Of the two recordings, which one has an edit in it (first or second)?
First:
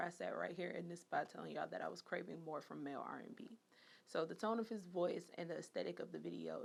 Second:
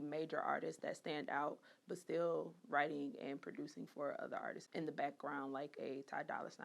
second